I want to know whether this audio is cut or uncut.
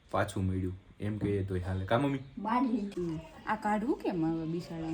cut